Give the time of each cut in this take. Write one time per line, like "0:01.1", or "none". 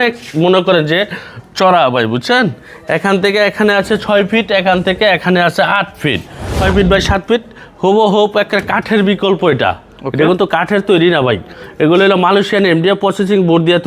0:06.6